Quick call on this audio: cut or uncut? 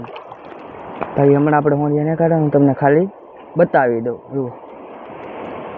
uncut